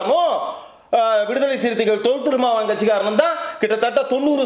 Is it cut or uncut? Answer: uncut